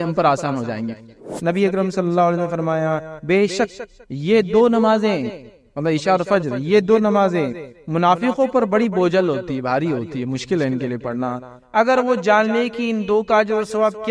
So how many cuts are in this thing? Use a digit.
1